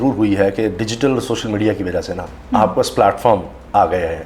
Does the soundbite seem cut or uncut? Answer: uncut